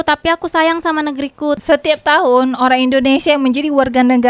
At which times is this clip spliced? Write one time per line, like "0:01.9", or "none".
0:01.6